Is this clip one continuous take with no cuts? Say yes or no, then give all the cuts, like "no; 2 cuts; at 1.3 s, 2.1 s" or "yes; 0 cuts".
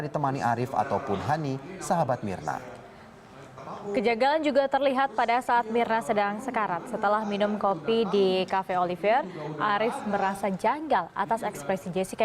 no; 1 cut; at 4.5 s